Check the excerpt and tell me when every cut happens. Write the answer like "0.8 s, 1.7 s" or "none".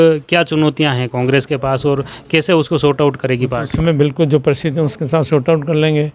none

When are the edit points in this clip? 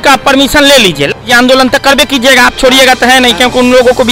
1.2 s

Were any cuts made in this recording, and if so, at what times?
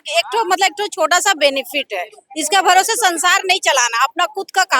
none

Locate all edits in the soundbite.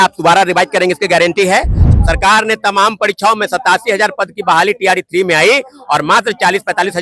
1.8 s

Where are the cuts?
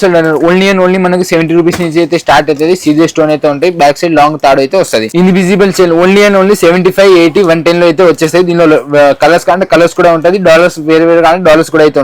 5.1 s

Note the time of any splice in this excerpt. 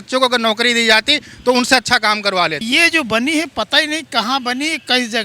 2.6 s

